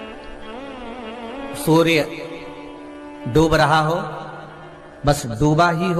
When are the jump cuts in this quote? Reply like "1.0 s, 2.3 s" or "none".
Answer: none